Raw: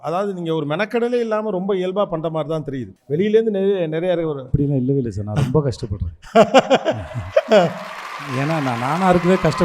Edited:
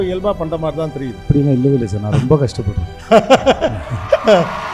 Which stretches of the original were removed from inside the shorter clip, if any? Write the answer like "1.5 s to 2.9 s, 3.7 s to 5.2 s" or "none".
2.9 s to 4.4 s